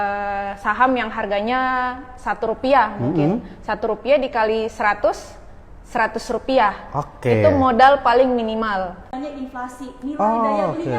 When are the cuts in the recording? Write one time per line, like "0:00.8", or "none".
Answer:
0:09.1